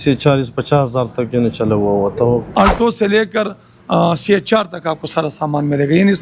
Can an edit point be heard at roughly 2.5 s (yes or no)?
yes